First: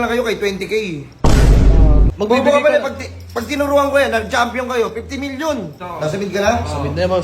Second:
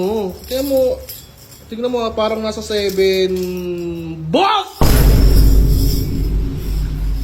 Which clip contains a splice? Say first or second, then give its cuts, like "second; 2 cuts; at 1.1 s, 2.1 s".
first; 2 cuts; at 2.1 s, 5.8 s